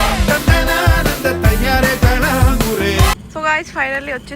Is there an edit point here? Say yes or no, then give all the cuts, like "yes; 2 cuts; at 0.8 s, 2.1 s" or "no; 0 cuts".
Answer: yes; 1 cut; at 3.2 s